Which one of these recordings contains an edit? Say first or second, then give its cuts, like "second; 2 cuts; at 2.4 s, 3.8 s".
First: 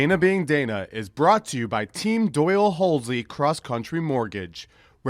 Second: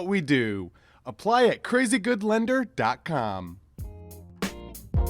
second; 1 cut; at 3.4 s